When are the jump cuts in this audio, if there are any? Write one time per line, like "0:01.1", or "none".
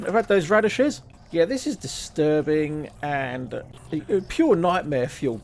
0:01.1
0:03.7